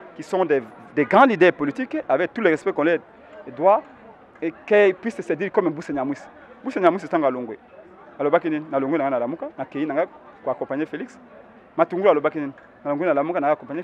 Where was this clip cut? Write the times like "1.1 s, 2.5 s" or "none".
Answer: none